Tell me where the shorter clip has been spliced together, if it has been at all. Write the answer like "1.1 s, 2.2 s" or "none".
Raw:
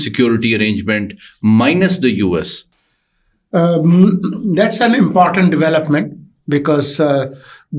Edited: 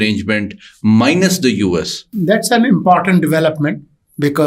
2.1 s